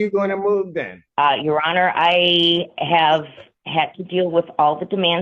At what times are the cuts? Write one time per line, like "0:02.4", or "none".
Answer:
0:01.0